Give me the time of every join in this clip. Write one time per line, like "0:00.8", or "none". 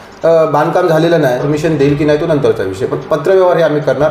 0:01.5